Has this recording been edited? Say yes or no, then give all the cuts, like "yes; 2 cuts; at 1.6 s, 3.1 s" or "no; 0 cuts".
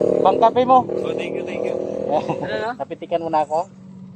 yes; 1 cut; at 2.5 s